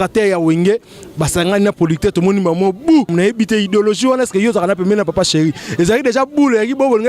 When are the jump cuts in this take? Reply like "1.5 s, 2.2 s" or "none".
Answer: 3.1 s